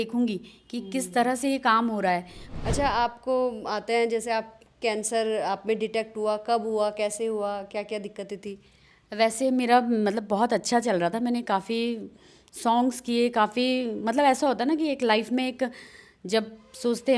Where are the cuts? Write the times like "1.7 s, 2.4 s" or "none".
2.4 s, 8.9 s

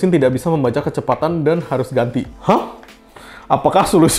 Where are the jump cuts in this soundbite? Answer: none

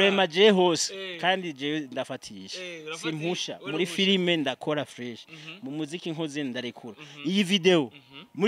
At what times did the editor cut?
none

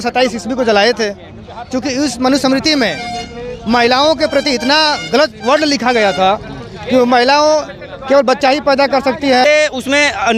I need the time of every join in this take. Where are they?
9.4 s

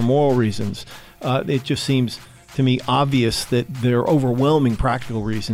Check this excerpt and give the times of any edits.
3.7 s

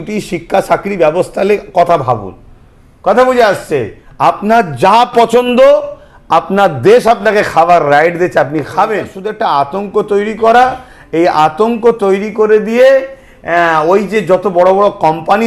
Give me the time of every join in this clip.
9.2 s

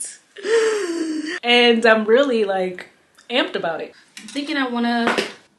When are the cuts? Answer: 1.3 s, 3.9 s

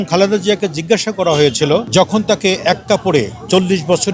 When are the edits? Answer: 1.9 s

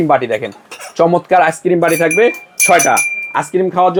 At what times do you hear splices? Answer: none

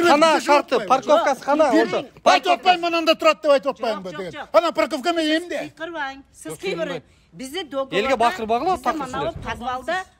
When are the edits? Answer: none

